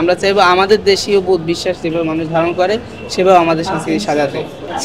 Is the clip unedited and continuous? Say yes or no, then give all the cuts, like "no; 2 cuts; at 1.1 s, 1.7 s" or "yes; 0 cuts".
yes; 0 cuts